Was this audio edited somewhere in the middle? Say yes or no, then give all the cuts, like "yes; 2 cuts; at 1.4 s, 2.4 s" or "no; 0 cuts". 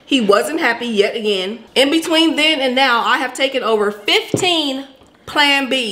yes; 1 cut; at 1.6 s